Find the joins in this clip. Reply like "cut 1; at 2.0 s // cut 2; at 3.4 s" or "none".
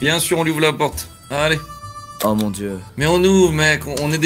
cut 1; at 2.9 s